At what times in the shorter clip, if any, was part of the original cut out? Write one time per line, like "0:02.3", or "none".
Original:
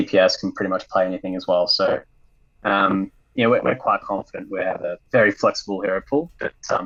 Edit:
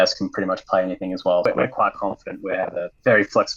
0:01.5